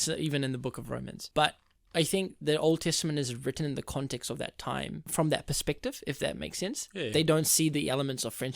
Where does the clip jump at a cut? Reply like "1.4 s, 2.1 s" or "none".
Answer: 1.2 s, 5.0 s